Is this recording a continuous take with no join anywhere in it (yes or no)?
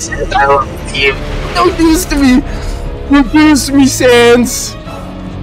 no